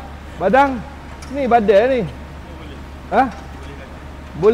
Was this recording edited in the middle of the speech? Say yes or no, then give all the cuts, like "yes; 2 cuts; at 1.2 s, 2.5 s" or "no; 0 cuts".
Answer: no; 0 cuts